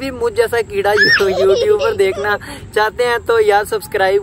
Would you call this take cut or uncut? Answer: uncut